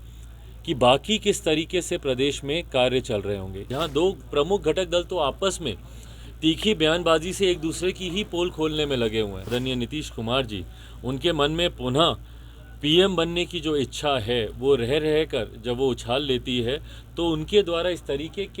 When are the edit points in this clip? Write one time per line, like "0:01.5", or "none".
0:03.7
0:09.4